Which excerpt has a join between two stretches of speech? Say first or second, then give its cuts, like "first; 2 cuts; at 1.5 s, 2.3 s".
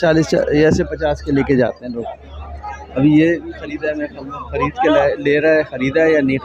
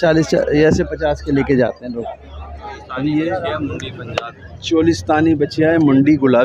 second; 1 cut; at 3.3 s